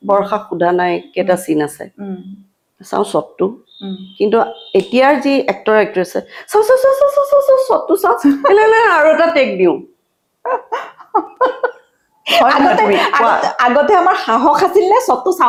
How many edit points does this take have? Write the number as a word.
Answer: zero